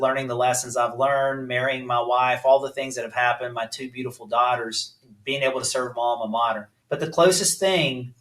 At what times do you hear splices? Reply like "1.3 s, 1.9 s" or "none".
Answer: 6.7 s

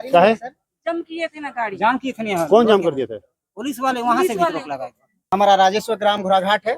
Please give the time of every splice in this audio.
5.2 s

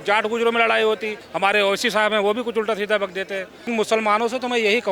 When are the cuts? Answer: 1.2 s, 3.7 s

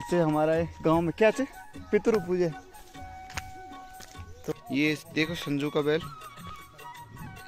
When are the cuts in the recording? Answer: 4.5 s

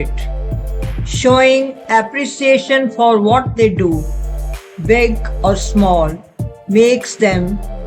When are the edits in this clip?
none

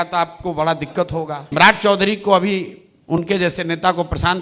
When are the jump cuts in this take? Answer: 1.5 s

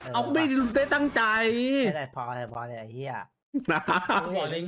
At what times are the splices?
3.4 s

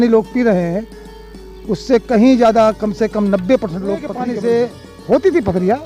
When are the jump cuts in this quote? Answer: 4.2 s

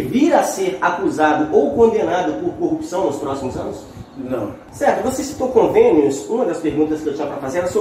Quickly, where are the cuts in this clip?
4.6 s

